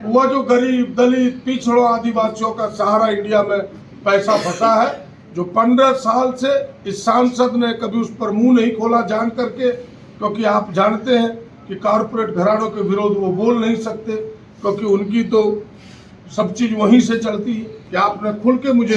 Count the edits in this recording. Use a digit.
1